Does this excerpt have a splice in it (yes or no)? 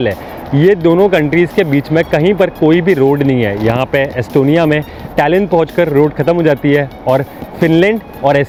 no